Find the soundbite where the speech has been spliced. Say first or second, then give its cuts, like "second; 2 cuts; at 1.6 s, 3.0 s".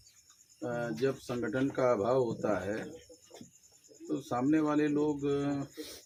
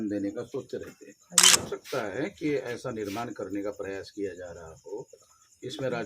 second; 1 cut; at 1.7 s